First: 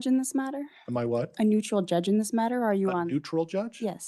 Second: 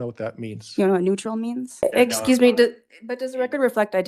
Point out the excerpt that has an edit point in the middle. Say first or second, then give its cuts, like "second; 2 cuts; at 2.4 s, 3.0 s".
second; 1 cut; at 1.8 s